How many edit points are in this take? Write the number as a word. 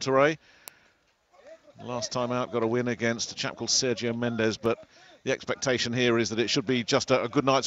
one